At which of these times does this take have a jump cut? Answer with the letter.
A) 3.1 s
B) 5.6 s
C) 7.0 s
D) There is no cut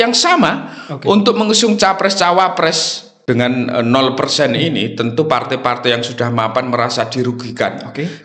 A